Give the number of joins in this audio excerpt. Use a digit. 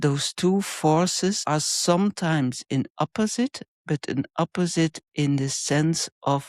1